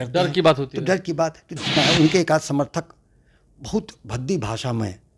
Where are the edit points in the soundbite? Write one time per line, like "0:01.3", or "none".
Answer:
0:01.7